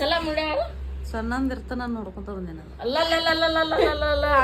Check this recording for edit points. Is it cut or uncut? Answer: uncut